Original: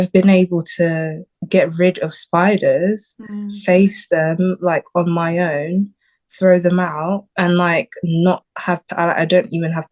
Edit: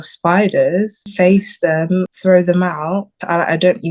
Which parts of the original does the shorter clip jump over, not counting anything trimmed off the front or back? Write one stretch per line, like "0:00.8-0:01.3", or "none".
0:03.1-0:03.5
0:04.6-0:06.2
0:07.3-0:08.8